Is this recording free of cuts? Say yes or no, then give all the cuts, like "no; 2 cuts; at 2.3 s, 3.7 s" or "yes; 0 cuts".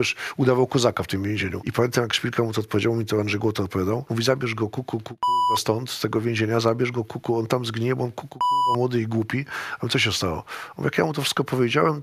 no; 2 cuts; at 1.6 s, 4.1 s